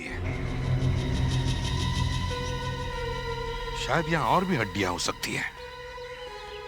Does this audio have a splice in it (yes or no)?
no